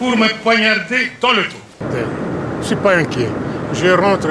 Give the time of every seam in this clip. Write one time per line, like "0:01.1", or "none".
0:01.8